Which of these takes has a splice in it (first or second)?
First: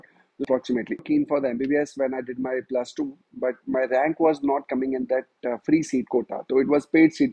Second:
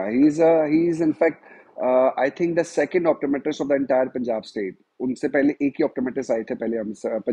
first